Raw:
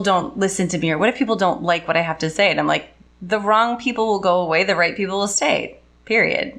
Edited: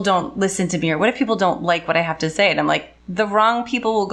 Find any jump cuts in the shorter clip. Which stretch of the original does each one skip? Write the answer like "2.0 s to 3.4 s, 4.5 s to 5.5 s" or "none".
3.0 s to 3.1 s